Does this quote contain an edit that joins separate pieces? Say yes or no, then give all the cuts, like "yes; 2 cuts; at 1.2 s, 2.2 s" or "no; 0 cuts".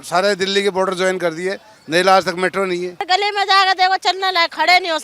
yes; 1 cut; at 3.0 s